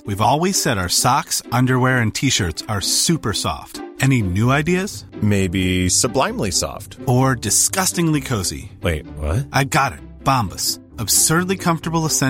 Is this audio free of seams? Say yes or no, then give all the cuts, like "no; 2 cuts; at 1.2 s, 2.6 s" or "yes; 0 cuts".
yes; 0 cuts